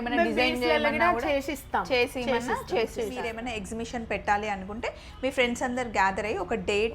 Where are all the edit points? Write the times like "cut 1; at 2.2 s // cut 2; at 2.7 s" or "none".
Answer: cut 1; at 3.3 s